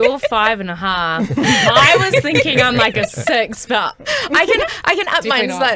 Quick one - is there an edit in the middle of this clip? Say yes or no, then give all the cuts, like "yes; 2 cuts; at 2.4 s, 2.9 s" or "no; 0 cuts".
no; 0 cuts